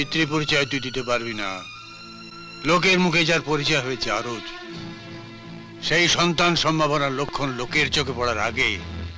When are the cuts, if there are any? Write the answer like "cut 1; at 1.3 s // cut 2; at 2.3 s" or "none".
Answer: none